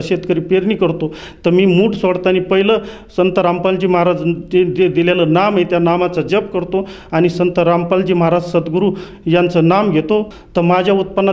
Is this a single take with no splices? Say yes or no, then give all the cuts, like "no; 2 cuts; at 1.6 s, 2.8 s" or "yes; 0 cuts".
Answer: yes; 0 cuts